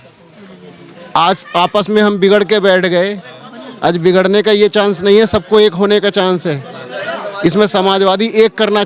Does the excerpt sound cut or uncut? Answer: uncut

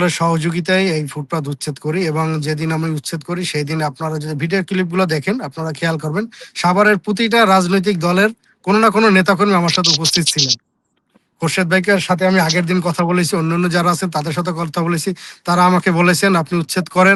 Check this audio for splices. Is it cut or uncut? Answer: uncut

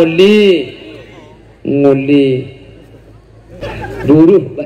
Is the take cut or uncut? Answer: cut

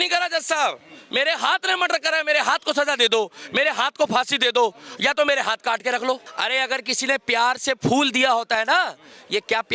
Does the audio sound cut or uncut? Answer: cut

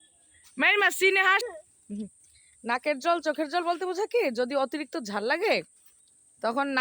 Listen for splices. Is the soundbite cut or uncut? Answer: cut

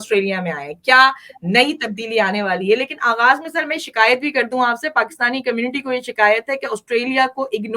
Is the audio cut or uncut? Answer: uncut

